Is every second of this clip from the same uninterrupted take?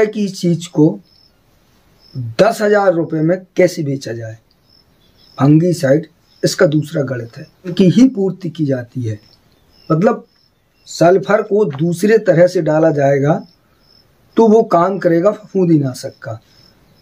no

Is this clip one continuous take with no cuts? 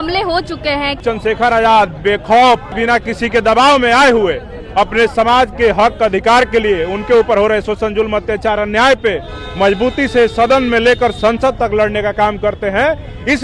no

